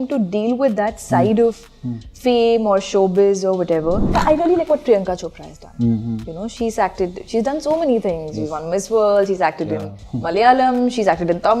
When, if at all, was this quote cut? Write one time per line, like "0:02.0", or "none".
0:04.1